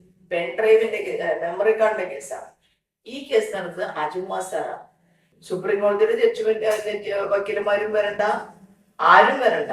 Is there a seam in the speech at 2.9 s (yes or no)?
no